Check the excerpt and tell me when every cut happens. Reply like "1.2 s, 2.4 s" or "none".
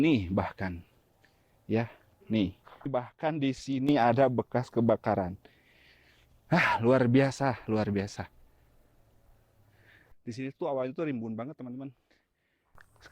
2.9 s, 10.2 s